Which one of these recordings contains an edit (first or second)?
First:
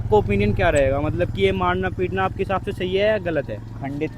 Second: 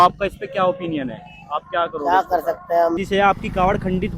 second